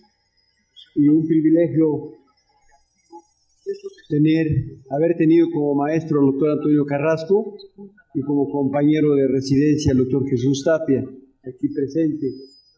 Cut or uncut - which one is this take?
cut